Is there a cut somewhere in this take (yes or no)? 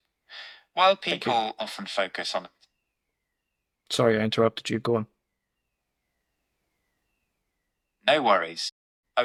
no